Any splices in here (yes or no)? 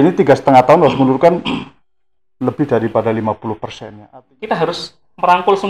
yes